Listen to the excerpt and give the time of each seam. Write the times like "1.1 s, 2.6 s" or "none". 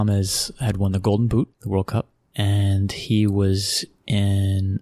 1.6 s